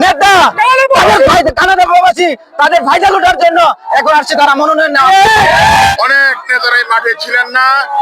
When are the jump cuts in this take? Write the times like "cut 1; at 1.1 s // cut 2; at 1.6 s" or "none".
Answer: cut 1; at 5.9 s